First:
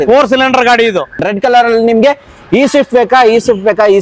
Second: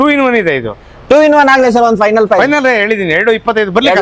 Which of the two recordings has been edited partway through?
first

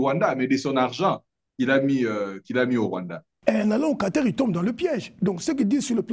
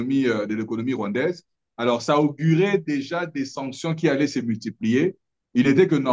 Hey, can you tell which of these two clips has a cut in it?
first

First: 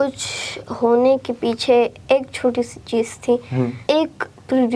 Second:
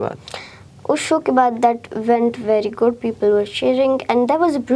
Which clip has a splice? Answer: first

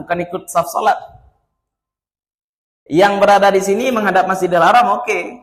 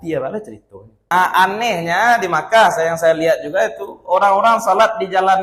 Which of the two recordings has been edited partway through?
second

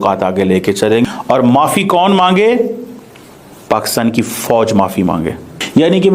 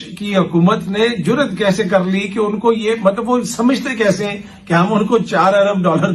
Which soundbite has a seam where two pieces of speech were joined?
first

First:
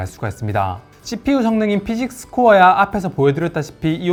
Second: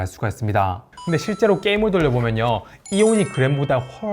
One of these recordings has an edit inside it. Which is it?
second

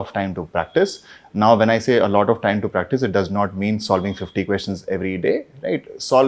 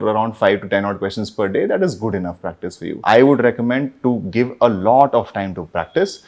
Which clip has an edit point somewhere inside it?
second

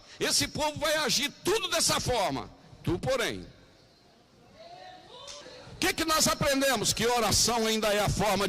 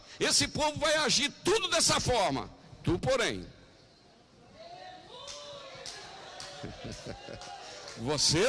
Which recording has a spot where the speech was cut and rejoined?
first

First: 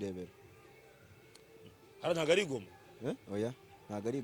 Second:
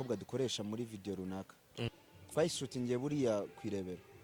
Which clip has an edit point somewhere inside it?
second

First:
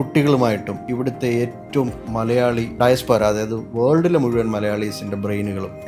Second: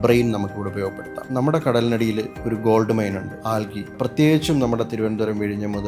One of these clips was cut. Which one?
second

